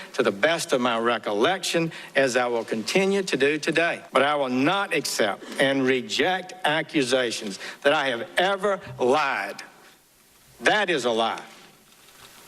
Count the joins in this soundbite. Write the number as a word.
one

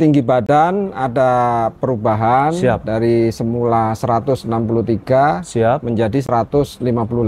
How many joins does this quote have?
zero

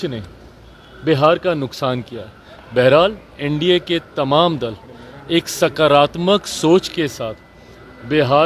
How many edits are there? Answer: zero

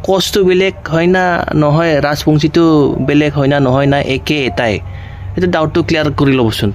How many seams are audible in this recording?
zero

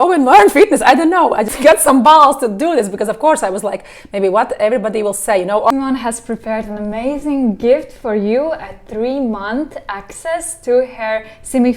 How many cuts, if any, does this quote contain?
two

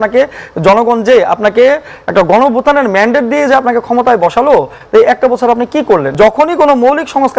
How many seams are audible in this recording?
one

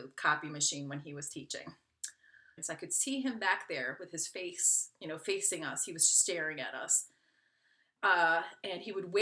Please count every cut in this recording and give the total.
one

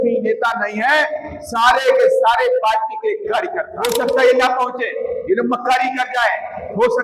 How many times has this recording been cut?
one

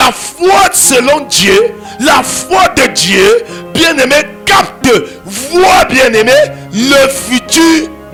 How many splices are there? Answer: zero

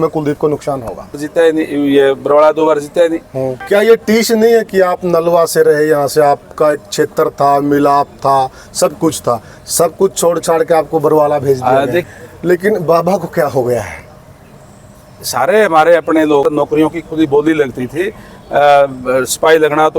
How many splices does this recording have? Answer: four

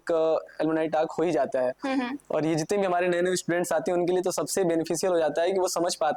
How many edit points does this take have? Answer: zero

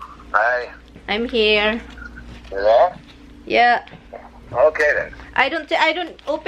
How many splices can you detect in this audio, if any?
zero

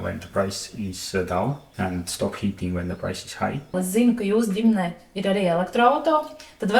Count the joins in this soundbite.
two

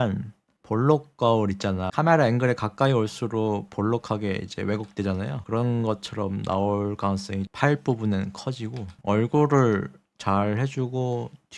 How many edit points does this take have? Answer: one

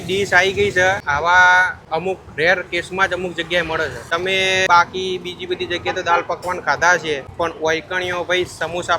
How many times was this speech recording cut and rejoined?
four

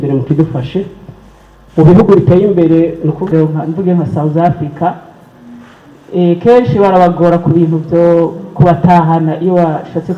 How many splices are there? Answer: one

